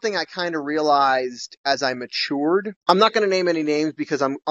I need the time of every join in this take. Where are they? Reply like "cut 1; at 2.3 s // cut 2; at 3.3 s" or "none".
none